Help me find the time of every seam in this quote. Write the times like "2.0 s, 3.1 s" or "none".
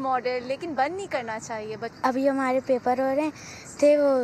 1.9 s